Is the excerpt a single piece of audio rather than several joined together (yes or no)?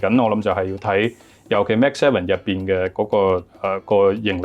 yes